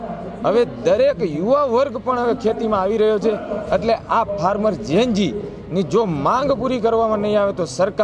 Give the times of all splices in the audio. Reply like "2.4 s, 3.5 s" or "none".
none